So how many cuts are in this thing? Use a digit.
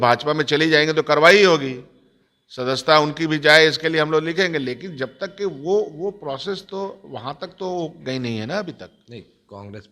0